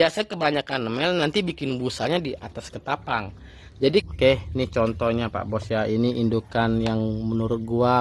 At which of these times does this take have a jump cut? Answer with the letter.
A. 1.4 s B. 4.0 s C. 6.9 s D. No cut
B